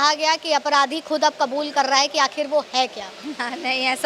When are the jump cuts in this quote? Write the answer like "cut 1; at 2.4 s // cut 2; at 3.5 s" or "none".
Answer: none